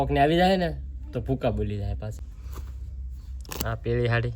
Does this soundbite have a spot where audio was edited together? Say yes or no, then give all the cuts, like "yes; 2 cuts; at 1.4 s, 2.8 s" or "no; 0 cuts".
yes; 1 cut; at 2.2 s